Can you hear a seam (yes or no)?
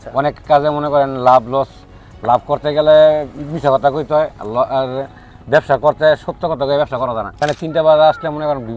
yes